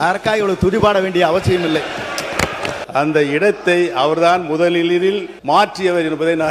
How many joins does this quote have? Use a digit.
2